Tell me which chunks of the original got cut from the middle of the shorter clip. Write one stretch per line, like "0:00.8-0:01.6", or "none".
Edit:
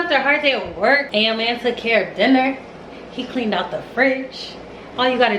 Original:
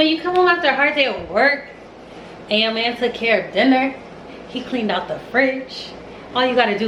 0:01.6-0:02.4